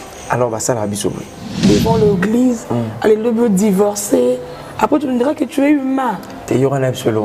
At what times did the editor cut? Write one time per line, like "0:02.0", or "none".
0:01.6